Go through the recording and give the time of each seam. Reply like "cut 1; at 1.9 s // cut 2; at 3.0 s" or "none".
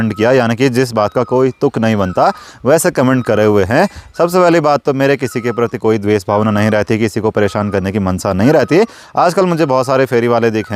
none

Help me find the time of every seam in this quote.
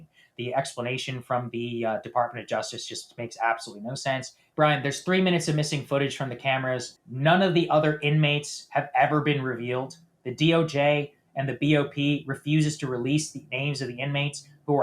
cut 1; at 4.4 s // cut 2; at 7.0 s

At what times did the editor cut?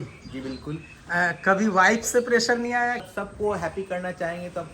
cut 1; at 3.1 s

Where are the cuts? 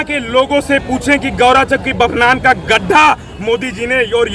none

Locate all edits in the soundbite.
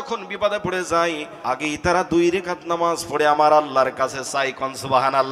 cut 1; at 1.3 s

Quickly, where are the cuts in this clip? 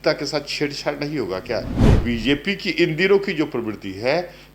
cut 1; at 1.7 s

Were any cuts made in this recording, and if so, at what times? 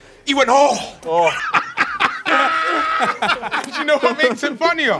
cut 1; at 1.4 s // cut 2; at 3.7 s

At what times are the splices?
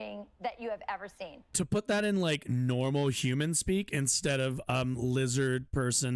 cut 1; at 1.5 s

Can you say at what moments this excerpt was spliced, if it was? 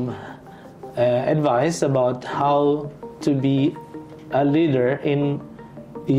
none

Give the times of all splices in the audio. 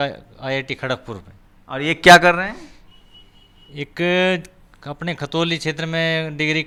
none

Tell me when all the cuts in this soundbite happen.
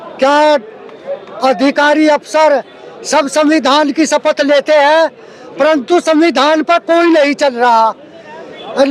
none

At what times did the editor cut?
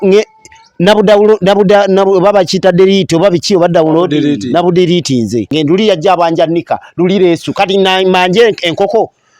cut 1; at 5.5 s

